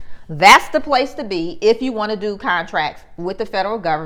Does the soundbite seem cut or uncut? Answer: uncut